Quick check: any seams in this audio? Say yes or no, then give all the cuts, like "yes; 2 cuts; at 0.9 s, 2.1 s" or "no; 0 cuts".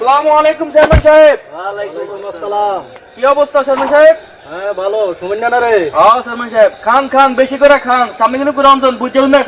no; 0 cuts